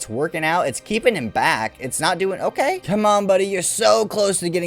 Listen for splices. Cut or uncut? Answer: cut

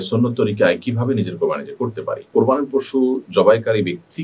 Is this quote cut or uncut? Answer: cut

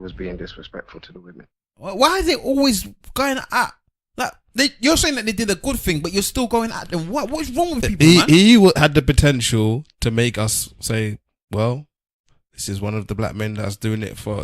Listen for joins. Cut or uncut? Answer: cut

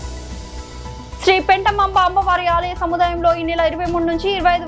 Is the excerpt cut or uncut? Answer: cut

